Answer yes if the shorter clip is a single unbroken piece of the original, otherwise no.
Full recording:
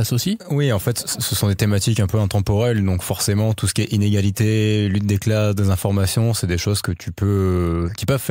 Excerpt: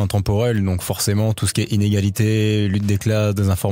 yes